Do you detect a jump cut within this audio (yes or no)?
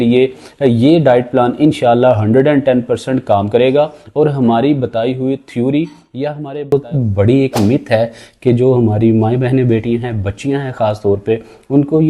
yes